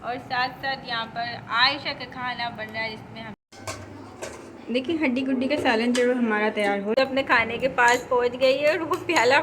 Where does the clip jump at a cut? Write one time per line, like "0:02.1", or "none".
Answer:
0:03.4
0:07.0